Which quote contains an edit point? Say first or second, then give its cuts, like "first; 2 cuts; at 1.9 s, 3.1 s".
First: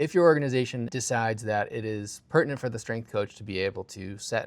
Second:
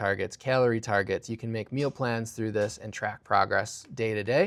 first; 1 cut; at 0.9 s